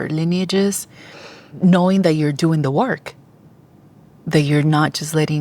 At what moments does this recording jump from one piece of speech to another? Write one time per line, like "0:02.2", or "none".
0:01.6